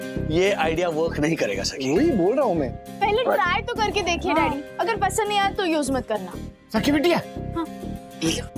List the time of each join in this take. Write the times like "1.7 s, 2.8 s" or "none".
none